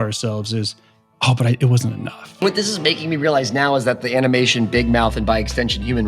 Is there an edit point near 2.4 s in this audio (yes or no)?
yes